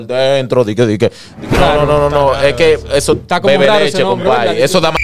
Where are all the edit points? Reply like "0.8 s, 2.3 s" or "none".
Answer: 1.6 s